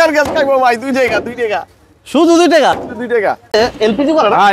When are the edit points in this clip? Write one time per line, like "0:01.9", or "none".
0:03.5

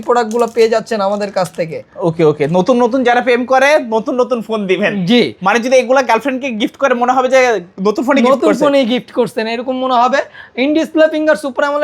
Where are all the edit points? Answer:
none

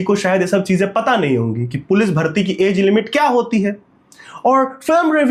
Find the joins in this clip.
none

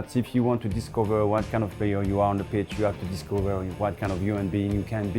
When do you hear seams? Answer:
none

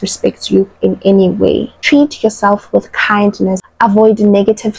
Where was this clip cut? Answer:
0:01.8
0:03.6

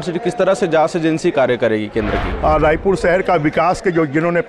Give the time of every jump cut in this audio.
0:02.3

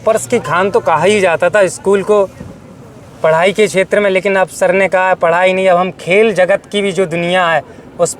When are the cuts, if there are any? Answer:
none

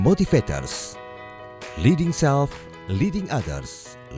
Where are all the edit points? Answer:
none

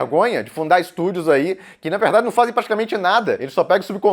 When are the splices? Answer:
none

